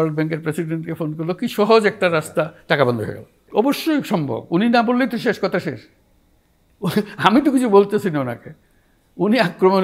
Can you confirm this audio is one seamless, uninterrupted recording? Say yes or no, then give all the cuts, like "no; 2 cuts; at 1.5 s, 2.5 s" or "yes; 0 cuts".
no; 1 cut; at 3.4 s